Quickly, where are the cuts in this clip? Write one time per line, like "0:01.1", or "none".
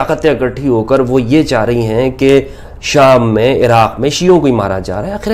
none